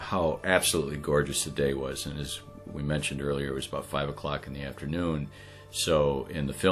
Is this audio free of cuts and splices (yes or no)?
yes